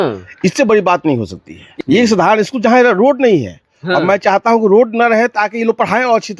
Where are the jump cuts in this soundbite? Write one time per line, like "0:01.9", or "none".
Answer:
0:01.8